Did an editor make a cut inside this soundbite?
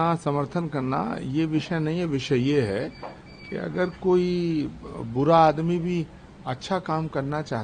no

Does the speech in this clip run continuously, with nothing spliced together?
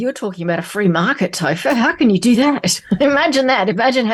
yes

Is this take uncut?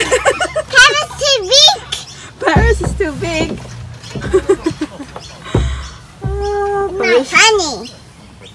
yes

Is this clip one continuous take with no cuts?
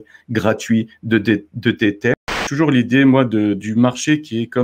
no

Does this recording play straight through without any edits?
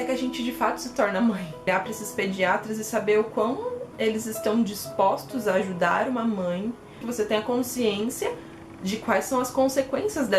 no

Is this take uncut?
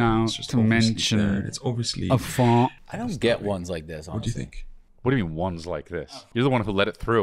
no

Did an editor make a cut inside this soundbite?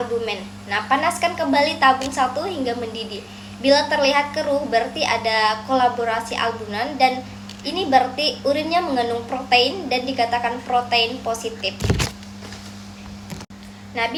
no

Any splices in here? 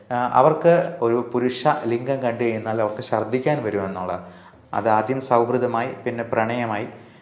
yes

